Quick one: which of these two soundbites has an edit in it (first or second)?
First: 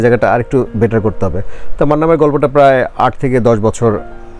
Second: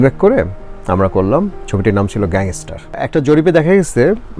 second